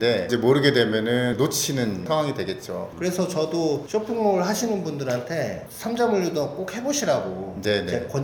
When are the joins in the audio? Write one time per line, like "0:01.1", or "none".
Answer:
none

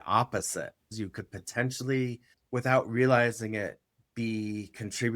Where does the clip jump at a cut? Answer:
0:00.8
0:02.3

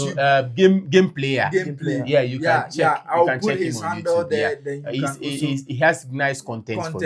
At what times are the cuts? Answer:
none

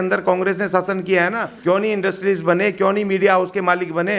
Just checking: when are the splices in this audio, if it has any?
0:01.5

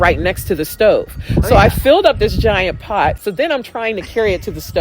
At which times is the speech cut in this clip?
0:03.2

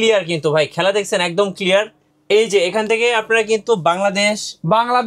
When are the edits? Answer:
0:02.1

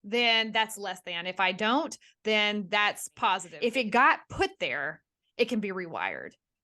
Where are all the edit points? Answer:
0:03.5

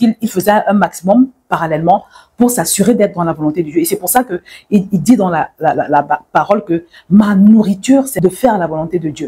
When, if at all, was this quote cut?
0:08.1

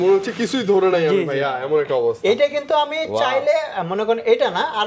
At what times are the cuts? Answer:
none

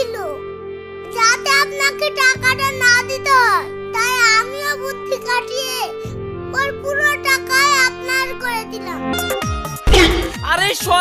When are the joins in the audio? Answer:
0:09.1

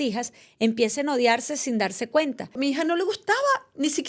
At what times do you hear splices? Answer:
0:02.6

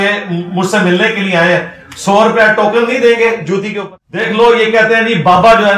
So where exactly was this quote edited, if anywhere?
0:03.7

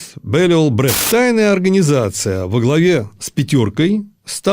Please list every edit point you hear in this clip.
0:01.0

